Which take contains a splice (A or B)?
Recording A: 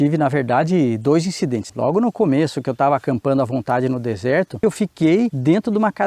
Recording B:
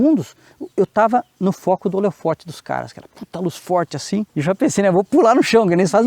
A